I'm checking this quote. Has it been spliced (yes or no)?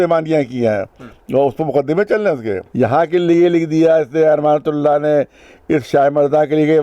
yes